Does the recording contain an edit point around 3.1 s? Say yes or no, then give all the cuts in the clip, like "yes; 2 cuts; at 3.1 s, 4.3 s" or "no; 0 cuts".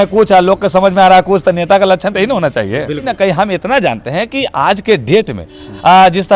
yes; 1 cut; at 3.1 s